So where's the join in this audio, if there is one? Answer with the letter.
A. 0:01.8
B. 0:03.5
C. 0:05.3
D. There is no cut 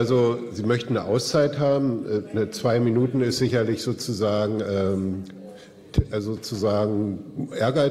D